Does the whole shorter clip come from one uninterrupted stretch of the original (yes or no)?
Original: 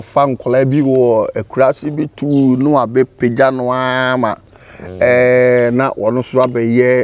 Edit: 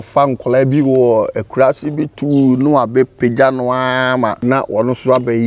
no